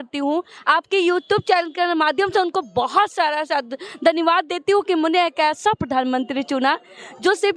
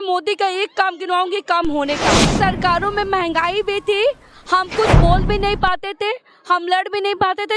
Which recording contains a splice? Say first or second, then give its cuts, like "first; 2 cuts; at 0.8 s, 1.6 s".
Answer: second; 1 cut; at 2.3 s